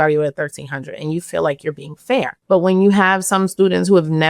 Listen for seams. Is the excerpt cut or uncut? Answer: cut